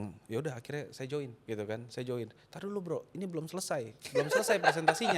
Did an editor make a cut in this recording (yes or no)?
yes